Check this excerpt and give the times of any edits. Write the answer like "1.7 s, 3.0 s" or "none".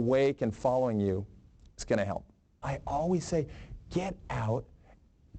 2.6 s